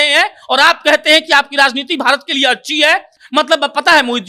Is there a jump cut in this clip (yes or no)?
no